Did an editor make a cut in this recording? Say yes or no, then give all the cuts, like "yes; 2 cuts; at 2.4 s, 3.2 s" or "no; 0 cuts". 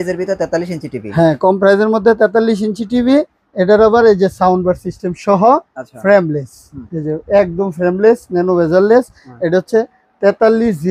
no; 0 cuts